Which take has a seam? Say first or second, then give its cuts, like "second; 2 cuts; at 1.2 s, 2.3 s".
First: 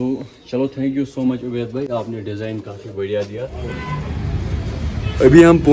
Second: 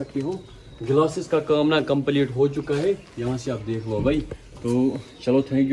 first; 1 cut; at 3.8 s